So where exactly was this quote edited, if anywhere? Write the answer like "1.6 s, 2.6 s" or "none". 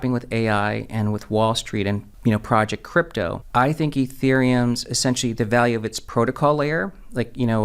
2.1 s, 3.4 s